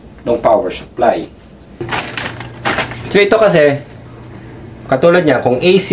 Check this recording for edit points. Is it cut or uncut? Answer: cut